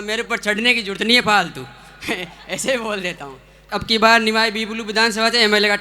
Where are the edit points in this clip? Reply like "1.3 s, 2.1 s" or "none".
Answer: 3.7 s